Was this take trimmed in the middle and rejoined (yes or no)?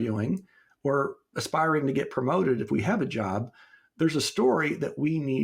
no